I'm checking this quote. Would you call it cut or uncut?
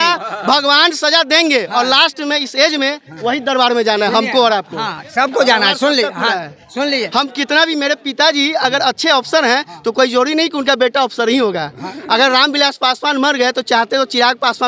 uncut